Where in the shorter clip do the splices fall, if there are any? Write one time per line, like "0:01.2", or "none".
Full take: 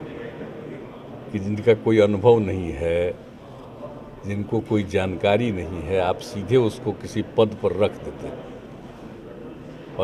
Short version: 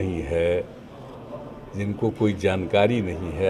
none